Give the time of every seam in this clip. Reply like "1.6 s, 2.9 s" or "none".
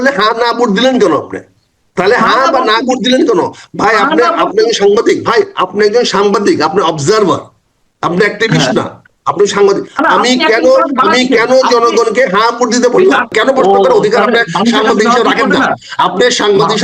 13.3 s